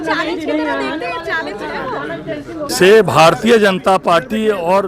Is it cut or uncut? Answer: cut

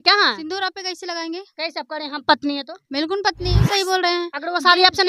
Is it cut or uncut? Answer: cut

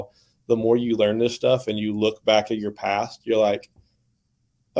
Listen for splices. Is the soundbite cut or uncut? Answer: uncut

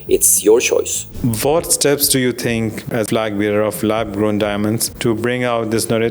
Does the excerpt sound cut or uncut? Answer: cut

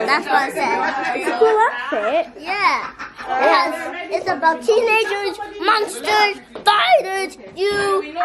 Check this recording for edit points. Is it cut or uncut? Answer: uncut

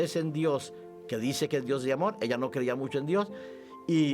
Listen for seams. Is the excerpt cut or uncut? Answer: uncut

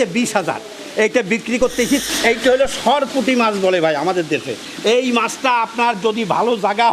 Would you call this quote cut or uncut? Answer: cut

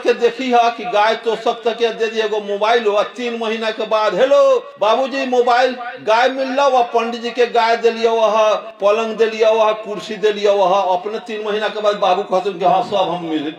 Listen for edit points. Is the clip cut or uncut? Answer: uncut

